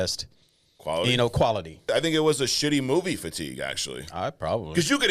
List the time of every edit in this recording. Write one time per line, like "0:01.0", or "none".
0:01.8